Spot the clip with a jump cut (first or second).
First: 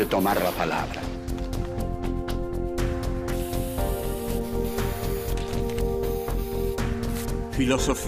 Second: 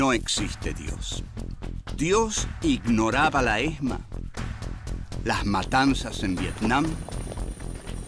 first